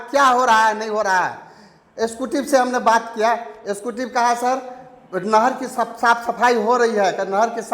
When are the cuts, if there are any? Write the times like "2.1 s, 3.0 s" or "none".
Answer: none